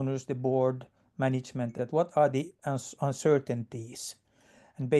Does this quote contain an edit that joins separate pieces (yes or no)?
yes